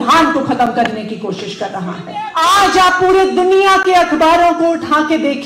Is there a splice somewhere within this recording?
yes; 1 cut; at 2.2 s

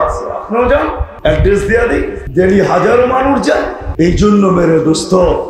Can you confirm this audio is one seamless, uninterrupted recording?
no; 3 cuts; at 1.1 s, 2.2 s, 3.8 s

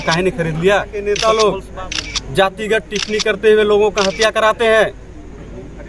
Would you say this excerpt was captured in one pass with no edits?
no; 1 cut; at 1.0 s

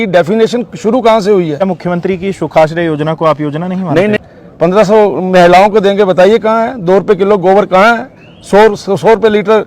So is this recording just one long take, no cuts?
no; 2 cuts; at 1.6 s, 4.3 s

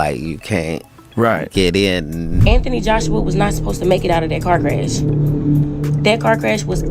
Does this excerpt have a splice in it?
yes; 1 cut; at 2.3 s

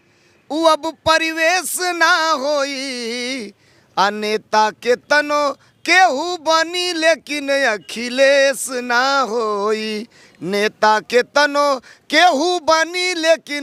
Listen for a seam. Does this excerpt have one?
no; 0 cuts

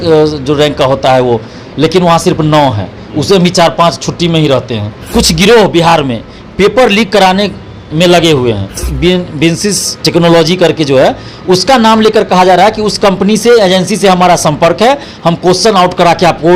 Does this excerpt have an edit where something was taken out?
yes; 2 cuts; at 5.1 s, 8.9 s

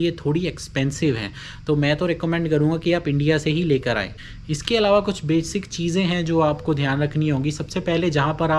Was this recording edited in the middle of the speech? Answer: no; 0 cuts

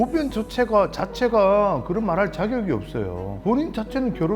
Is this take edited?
no; 0 cuts

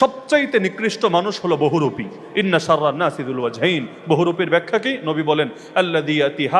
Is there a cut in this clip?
no; 0 cuts

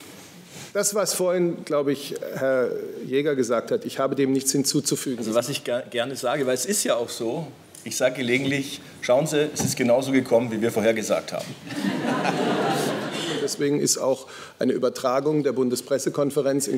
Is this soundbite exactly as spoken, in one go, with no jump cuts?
no; 2 cuts; at 5.1 s, 13.4 s

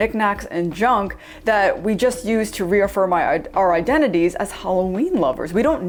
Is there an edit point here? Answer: no; 0 cuts

